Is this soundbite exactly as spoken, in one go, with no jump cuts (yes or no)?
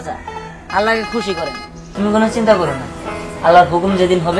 no